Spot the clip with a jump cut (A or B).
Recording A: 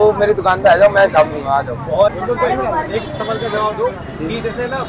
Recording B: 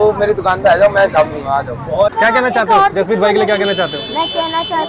B